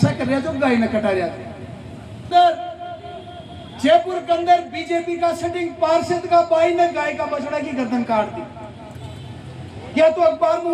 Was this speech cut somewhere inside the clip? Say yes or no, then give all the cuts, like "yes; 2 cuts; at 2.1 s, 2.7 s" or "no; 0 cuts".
yes; 1 cut; at 2.3 s